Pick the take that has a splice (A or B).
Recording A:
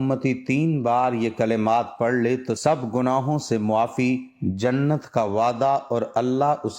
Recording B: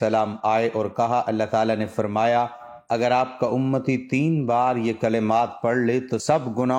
A